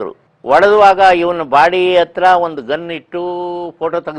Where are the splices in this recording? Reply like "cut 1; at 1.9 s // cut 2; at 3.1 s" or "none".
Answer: none